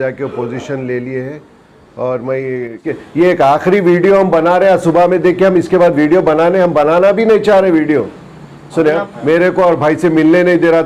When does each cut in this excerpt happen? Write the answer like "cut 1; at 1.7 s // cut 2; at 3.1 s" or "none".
cut 1; at 2.9 s // cut 2; at 9.1 s